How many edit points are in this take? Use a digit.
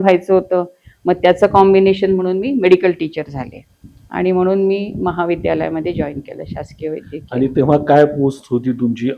0